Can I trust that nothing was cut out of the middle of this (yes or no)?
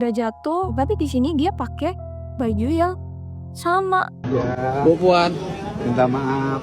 no